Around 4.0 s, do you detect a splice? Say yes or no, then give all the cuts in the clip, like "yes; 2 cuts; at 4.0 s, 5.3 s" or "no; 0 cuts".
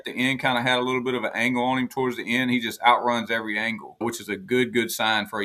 yes; 1 cut; at 4.0 s